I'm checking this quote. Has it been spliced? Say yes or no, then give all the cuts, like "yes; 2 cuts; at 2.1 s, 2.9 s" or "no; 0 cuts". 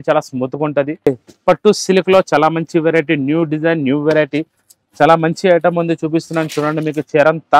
yes; 1 cut; at 1.1 s